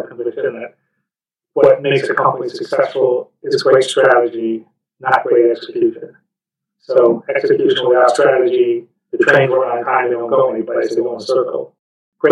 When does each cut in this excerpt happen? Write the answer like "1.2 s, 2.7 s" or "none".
9.0 s